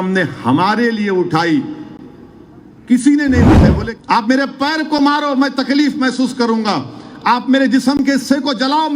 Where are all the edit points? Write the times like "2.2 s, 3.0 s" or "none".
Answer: 3.7 s